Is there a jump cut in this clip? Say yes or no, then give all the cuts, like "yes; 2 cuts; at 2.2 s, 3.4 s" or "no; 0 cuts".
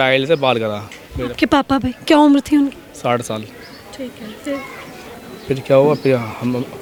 no; 0 cuts